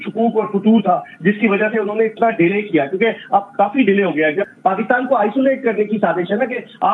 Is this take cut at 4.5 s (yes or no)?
no